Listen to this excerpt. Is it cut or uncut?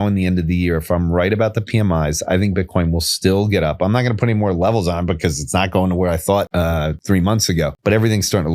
cut